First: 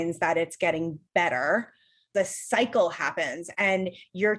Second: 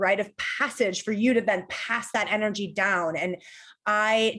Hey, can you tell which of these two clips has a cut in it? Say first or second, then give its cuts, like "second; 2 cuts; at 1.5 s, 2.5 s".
first; 1 cut; at 2.1 s